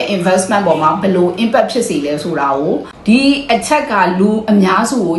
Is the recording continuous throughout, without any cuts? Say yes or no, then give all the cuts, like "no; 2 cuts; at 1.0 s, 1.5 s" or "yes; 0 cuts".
no; 1 cut; at 2.6 s